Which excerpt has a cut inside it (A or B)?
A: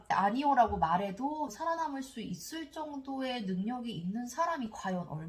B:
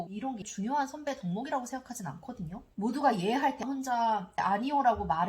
B